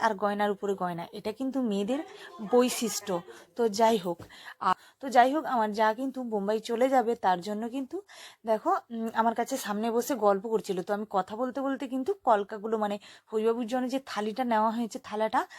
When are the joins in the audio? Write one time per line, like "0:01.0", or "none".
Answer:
0:04.7